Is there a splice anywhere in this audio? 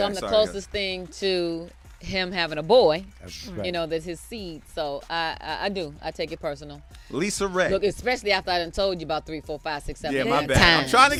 no; 0 cuts

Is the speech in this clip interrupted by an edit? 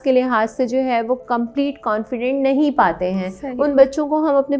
no; 0 cuts

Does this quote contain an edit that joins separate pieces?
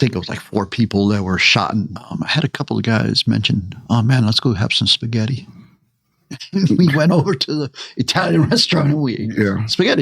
yes; 1 cut; at 2.0 s

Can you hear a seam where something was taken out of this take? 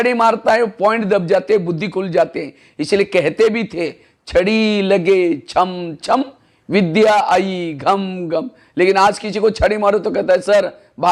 no; 0 cuts

